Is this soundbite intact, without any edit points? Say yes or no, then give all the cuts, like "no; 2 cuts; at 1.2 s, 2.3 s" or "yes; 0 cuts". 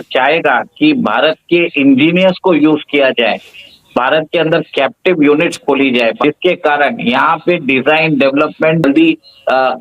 no; 2 cuts; at 6.2 s, 8.8 s